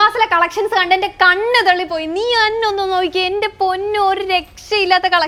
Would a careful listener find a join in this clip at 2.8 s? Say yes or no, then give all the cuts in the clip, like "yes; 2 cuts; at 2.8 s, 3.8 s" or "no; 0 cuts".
no; 0 cuts